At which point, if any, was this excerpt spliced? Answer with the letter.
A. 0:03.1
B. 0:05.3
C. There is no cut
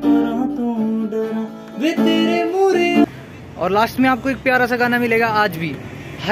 A